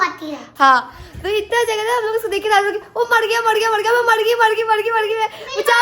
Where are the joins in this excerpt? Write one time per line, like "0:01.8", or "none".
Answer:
none

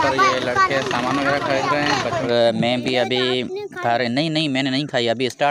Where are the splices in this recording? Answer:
0:02.3

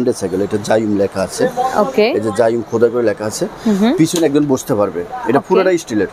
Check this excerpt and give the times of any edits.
none

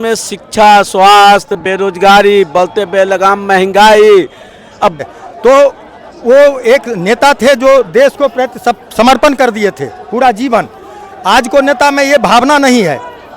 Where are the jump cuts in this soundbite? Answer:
0:05.0

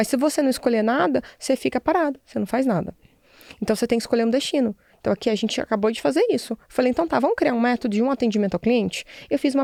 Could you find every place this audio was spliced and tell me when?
none

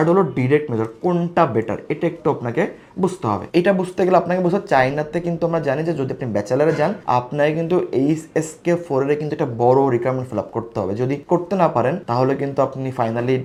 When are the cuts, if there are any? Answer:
none

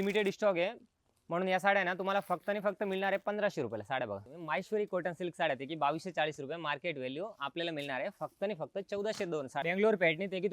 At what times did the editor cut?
0:04.3
0:09.6

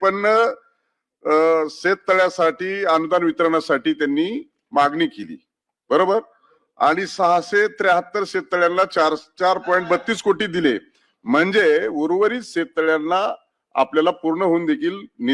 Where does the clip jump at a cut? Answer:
none

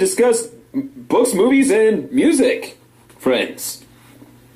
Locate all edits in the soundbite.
0:03.3

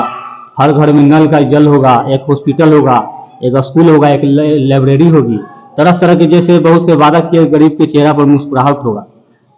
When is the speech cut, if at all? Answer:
none

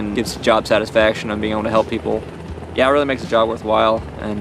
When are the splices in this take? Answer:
none

